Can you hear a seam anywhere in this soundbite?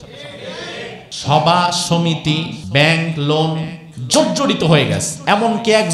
yes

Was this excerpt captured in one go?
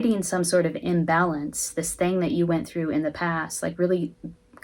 yes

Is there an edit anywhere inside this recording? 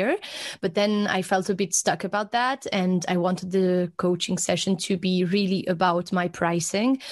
no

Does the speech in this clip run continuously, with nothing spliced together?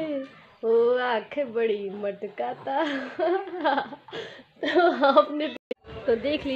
no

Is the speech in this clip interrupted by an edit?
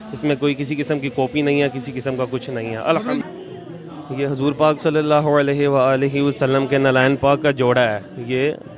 yes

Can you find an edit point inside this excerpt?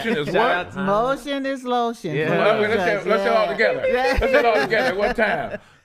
no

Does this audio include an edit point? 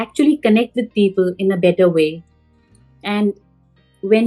no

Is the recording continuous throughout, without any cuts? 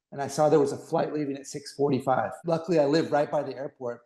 no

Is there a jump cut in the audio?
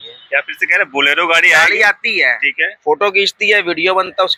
no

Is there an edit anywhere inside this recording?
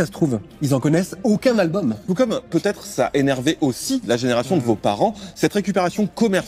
yes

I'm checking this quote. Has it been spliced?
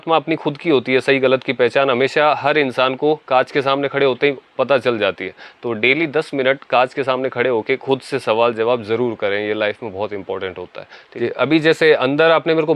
yes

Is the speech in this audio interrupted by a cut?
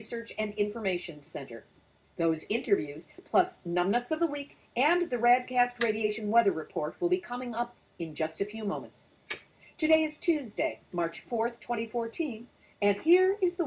no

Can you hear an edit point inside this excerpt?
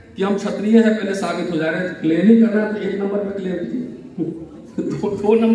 no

